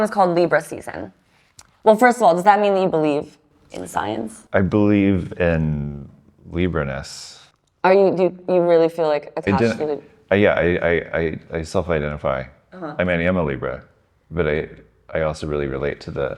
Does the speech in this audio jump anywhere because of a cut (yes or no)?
no